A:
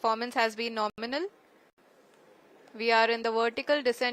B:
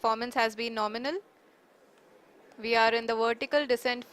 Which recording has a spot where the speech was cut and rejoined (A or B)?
B